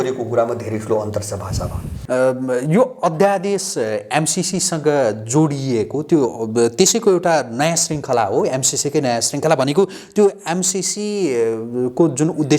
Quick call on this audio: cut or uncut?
cut